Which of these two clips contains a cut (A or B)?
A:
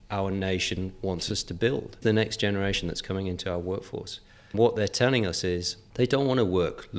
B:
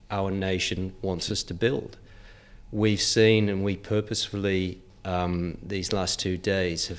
A